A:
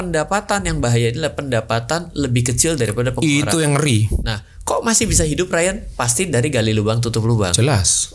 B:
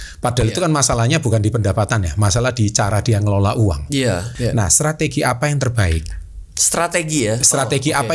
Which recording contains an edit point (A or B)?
B